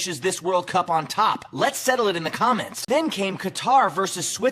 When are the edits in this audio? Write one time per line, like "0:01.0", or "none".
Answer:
0:02.8